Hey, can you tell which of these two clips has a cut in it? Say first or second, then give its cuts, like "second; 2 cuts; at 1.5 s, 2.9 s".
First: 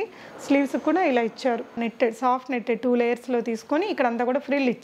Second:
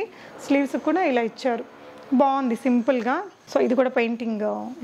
first; 1 cut; at 1.8 s